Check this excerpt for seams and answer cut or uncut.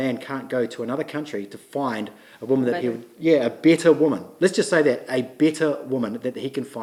uncut